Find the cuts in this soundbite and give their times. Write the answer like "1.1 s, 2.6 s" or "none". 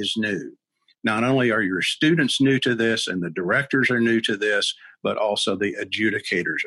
none